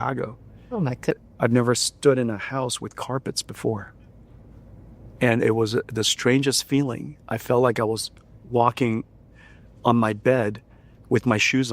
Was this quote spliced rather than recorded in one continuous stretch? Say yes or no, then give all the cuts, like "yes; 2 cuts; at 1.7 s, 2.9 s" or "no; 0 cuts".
yes; 1 cut; at 1.1 s